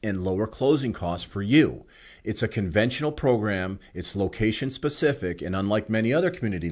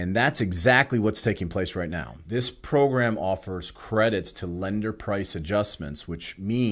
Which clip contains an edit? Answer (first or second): second